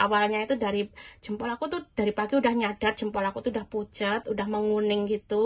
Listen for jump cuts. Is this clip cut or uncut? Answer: uncut